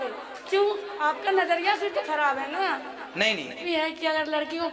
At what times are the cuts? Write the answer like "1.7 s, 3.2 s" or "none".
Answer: 3.6 s